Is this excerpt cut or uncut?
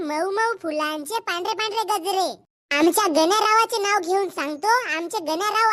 uncut